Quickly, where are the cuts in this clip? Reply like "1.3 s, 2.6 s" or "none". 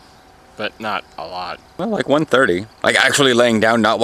1.8 s, 2.7 s